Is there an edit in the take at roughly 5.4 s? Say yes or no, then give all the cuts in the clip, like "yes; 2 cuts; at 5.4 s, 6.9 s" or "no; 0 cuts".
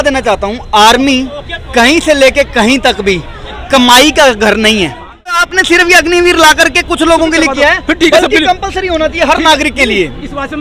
yes; 1 cut; at 5.4 s